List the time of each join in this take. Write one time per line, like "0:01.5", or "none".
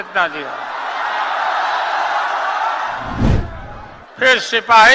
0:03.3